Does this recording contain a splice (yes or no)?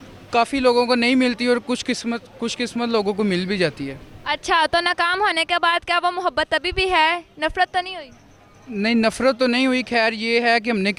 no